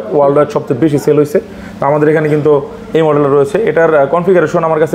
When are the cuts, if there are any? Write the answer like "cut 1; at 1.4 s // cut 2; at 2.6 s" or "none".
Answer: none